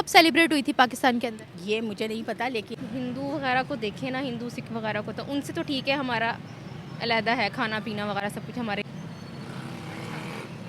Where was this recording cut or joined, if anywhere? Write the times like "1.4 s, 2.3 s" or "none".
2.8 s, 8.8 s